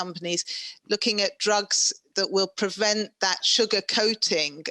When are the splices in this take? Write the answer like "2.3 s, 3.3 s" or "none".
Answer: 3.4 s